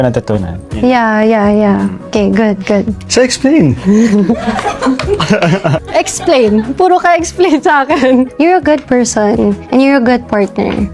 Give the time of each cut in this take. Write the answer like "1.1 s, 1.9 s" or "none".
3.0 s